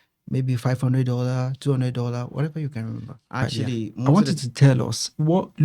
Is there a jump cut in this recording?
yes; 1 cut; at 4.0 s

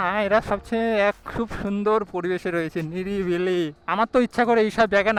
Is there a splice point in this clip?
no; 0 cuts

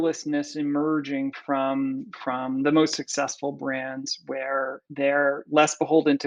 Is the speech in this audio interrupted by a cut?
no; 0 cuts

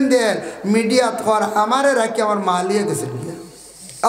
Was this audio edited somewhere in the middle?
no; 0 cuts

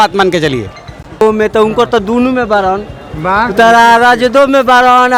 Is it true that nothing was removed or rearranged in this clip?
yes; 0 cuts

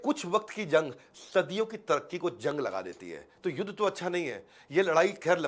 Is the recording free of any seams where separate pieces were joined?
yes; 0 cuts

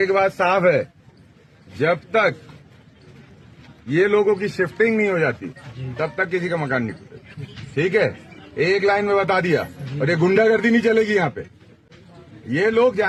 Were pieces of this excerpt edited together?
no; 0 cuts

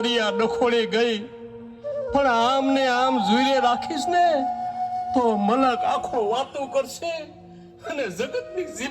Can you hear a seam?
no; 0 cuts

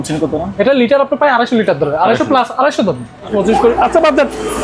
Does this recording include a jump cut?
yes; 1 cut; at 3.3 s

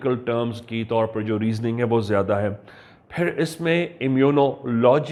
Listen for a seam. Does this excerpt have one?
no; 0 cuts

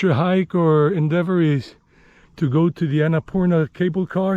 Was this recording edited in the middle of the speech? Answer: no; 0 cuts

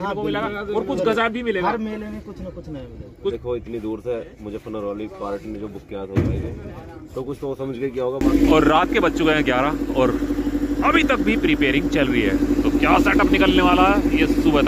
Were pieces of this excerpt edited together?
yes; 2 cuts; at 3.3 s, 8.2 s

